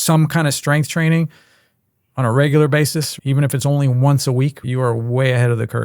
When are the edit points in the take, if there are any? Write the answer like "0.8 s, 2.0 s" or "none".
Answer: 3.1 s, 4.6 s